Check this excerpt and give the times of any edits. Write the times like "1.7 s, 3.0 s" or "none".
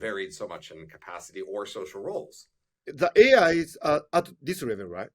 2.9 s